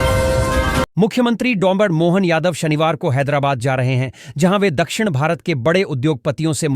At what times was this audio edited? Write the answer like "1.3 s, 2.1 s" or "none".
0.9 s